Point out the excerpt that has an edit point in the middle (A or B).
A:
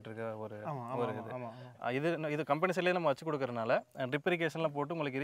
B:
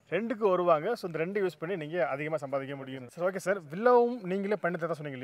B